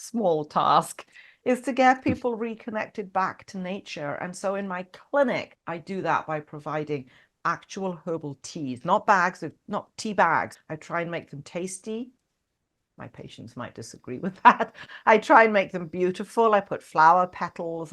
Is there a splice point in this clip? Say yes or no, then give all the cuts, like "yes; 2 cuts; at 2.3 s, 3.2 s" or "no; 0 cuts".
yes; 2 cuts; at 5.6 s, 10.5 s